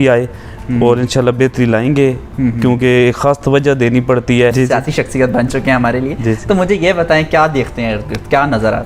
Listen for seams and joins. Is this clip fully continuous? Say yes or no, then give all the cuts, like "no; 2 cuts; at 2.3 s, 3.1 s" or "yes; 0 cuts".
no; 1 cut; at 4.5 s